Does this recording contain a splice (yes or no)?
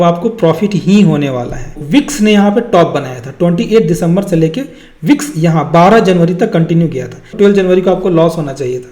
yes